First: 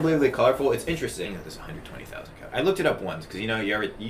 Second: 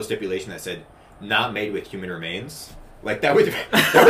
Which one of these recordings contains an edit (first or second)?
first